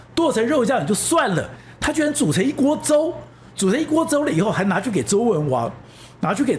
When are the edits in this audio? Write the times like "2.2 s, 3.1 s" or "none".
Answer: none